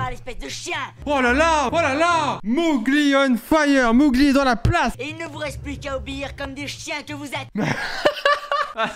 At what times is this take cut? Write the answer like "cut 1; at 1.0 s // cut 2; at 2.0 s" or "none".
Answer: cut 1; at 2.4 s // cut 2; at 5.0 s